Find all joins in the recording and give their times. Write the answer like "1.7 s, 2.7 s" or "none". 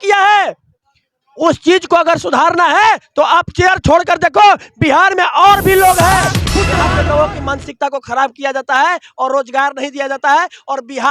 6.7 s